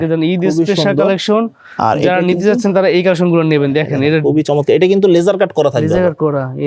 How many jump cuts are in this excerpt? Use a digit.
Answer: 0